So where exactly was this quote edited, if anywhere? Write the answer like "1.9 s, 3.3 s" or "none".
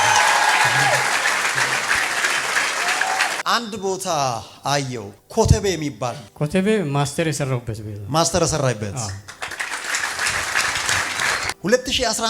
3.4 s, 11.5 s